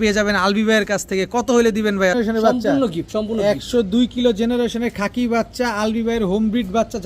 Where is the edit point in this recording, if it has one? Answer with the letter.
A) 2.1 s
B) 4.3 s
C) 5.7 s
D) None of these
A